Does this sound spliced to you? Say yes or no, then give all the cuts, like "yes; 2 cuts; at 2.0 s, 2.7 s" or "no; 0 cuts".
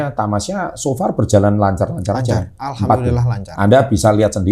no; 0 cuts